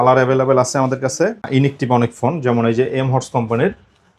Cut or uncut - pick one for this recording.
cut